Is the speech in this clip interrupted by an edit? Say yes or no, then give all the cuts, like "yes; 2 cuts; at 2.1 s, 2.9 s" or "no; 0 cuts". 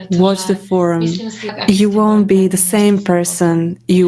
yes; 1 cut; at 1.6 s